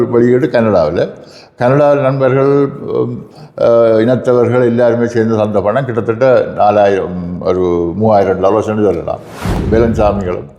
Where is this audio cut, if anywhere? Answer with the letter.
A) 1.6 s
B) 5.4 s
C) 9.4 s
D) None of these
C